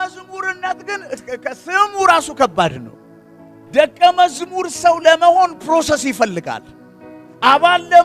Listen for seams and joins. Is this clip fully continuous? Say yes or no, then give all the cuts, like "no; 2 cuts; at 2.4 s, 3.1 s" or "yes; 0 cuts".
yes; 0 cuts